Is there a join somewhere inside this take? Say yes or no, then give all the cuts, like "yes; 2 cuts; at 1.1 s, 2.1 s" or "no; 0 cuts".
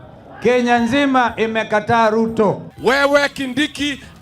yes; 1 cut; at 2.7 s